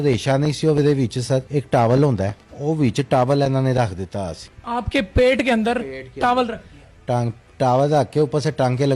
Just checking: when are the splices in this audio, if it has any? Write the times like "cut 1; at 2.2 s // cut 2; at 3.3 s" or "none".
none